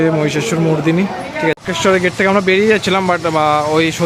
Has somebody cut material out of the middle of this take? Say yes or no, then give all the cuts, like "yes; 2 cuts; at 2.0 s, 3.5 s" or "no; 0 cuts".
yes; 1 cut; at 1.6 s